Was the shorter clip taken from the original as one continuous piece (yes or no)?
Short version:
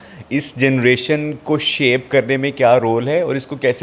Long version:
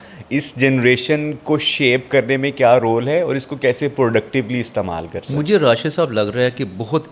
yes